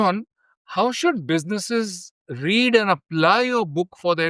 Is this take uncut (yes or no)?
yes